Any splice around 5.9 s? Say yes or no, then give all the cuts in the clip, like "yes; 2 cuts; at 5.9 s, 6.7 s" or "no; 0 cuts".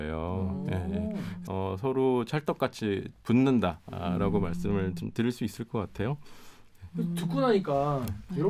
no; 1 cut; at 1.3 s